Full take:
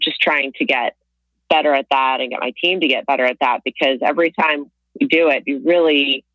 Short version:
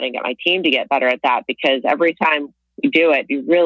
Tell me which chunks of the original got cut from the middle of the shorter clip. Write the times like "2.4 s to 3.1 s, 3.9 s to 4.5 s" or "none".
none

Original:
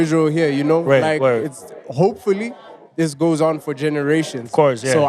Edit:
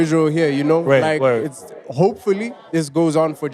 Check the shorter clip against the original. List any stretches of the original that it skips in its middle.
2.5 s to 2.8 s

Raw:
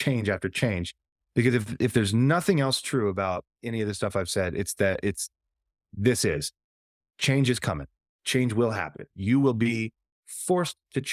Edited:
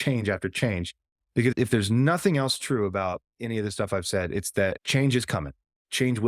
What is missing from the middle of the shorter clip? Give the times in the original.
1.5 s to 1.7 s, 5.0 s to 7.1 s

